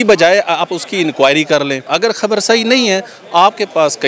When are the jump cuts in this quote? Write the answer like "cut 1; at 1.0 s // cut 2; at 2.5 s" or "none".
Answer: cut 1; at 1.8 s